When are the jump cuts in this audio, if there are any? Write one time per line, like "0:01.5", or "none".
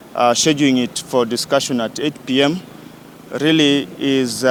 none